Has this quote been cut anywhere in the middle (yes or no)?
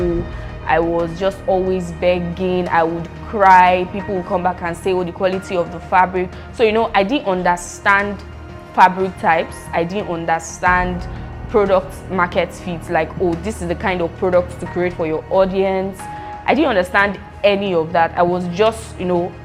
no